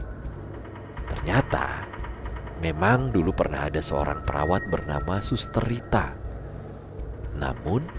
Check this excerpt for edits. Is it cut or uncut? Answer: uncut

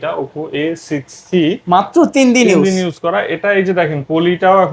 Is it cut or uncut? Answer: uncut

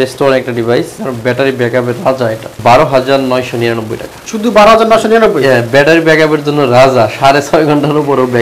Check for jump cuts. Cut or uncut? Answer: cut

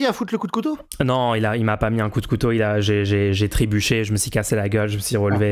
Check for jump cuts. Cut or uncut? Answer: uncut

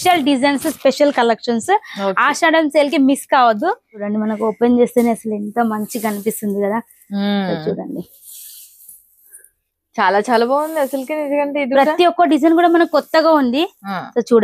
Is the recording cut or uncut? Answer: cut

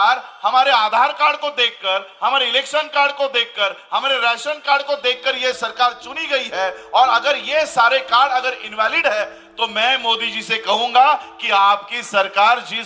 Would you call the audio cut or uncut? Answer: uncut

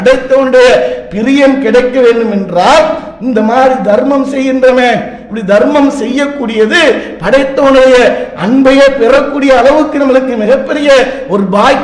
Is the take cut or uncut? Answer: uncut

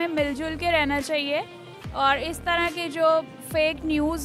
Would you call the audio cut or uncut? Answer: uncut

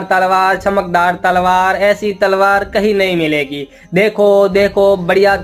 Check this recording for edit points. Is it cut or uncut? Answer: uncut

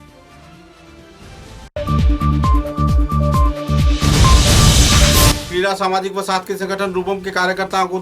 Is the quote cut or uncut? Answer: cut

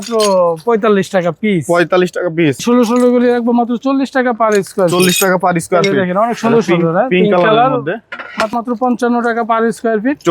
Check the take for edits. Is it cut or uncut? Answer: cut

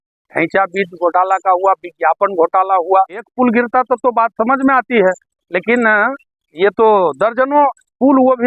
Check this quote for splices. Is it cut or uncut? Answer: cut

